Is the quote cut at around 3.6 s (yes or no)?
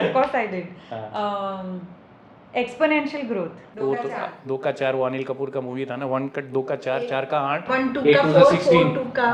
yes